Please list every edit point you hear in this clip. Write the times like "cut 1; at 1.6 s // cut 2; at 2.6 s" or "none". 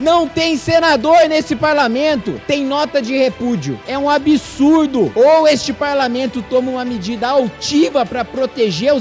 cut 1; at 3.8 s